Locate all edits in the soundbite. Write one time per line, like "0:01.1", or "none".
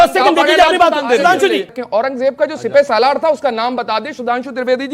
0:01.7